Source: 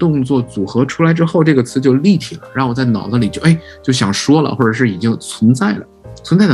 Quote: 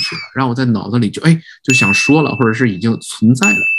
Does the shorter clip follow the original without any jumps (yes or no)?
yes